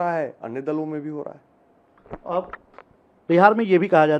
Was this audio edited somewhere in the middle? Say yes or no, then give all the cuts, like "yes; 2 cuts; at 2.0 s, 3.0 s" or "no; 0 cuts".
no; 0 cuts